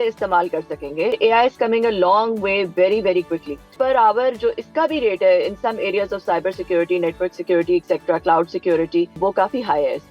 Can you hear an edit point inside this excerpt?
yes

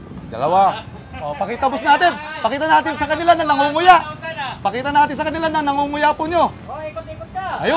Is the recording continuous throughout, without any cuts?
yes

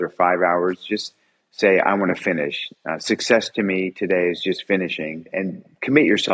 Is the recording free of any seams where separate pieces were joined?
no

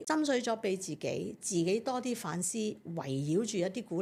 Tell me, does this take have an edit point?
no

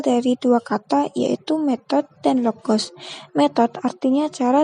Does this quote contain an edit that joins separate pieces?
no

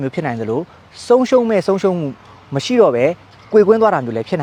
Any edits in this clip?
no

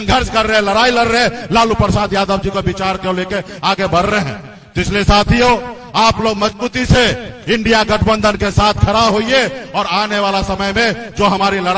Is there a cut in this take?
no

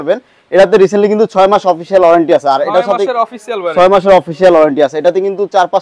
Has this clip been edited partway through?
no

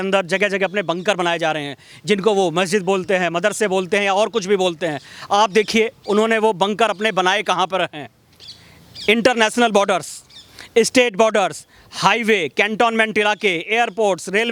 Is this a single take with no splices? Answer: yes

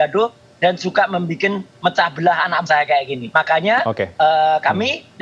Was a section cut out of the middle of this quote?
no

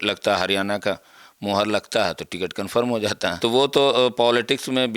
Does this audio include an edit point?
yes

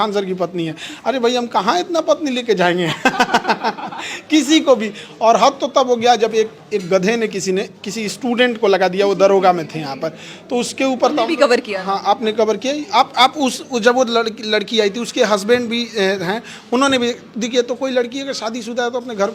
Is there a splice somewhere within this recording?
no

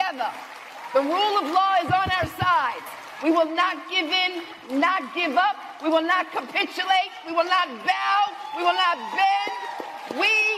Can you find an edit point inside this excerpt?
no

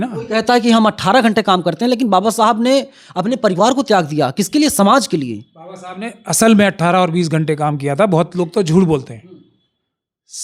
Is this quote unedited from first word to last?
yes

